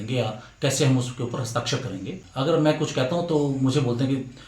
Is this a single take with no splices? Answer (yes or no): no